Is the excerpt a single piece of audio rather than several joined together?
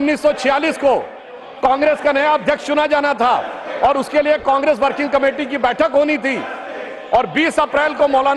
yes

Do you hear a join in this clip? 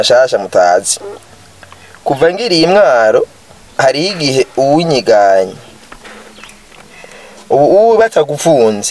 no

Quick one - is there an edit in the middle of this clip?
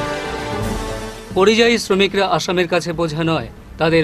no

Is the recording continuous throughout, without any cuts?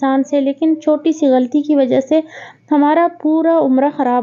yes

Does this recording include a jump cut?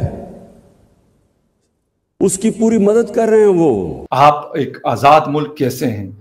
yes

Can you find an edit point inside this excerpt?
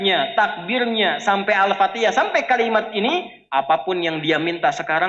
no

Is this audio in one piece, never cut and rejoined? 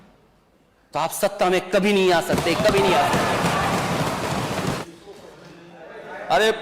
no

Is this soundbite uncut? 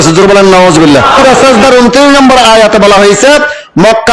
no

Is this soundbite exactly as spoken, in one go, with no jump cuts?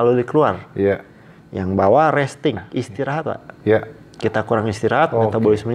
yes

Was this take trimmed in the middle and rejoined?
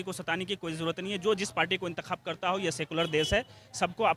no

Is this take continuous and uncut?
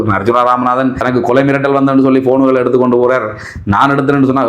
no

